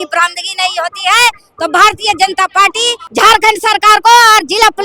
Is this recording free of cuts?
no; 1 cut; at 3.0 s

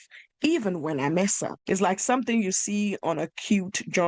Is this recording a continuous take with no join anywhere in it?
no; 1 cut; at 1.6 s

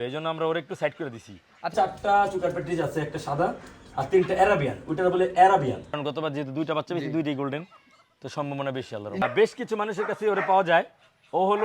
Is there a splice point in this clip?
yes; 3 cuts; at 1.7 s, 6.0 s, 9.2 s

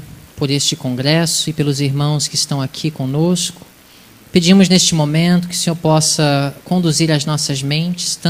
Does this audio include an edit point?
no; 0 cuts

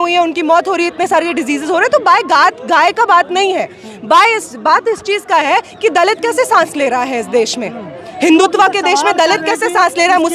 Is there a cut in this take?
no; 0 cuts

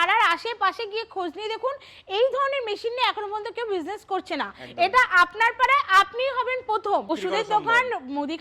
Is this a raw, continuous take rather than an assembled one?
no; 1 cut; at 7.1 s

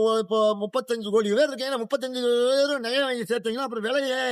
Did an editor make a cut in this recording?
no; 0 cuts

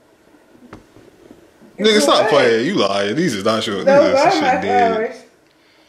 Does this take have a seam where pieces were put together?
no; 0 cuts

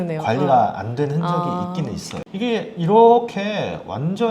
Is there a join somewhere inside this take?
yes; 1 cut; at 2.1 s

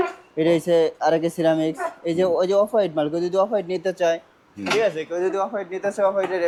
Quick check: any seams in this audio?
no; 0 cuts

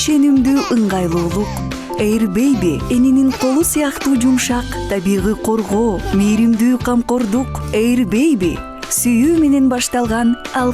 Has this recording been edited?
no; 0 cuts

